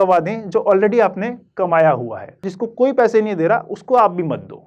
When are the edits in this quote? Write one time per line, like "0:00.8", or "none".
0:02.5